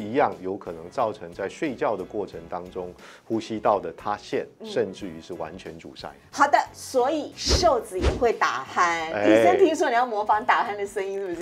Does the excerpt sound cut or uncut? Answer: uncut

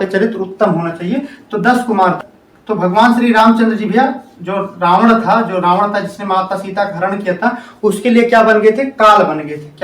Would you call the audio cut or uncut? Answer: cut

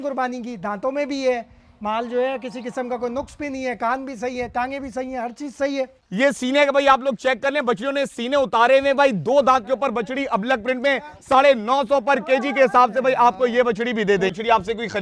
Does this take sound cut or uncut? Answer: cut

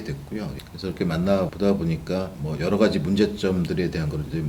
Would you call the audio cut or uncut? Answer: uncut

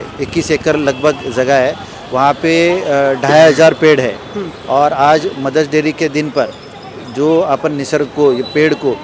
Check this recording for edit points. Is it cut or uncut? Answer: uncut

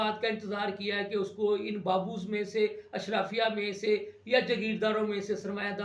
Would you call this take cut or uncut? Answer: uncut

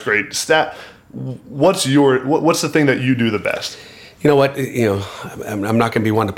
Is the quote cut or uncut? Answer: uncut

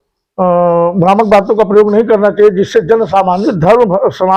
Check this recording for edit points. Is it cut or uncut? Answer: cut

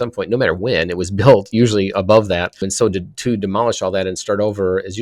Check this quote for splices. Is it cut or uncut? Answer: cut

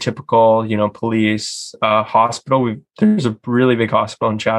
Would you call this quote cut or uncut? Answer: uncut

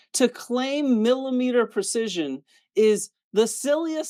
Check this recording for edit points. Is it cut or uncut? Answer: uncut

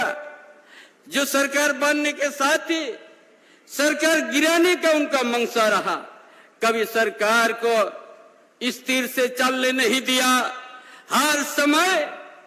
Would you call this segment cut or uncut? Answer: uncut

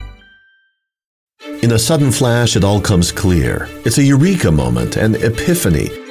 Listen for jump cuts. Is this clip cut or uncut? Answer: cut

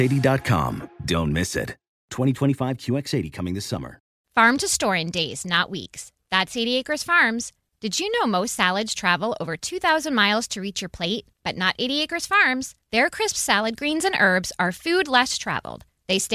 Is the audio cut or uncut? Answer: cut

